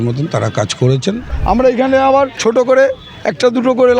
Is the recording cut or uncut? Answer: cut